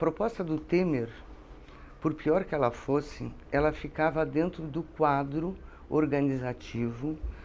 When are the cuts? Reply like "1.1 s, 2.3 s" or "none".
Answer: none